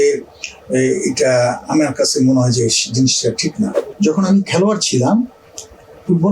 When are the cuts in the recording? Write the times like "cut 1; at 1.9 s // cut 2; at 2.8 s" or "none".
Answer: cut 1; at 3.8 s